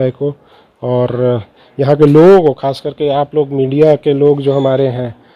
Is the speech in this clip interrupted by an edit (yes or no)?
no